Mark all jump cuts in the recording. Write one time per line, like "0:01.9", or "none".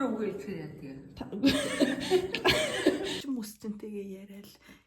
0:03.2